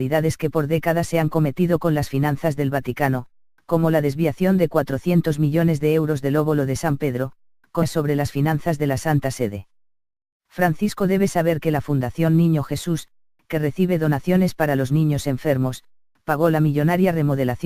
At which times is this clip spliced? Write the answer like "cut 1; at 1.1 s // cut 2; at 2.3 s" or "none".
none